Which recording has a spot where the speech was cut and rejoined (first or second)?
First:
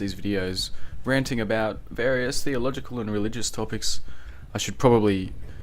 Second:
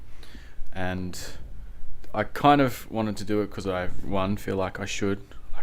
first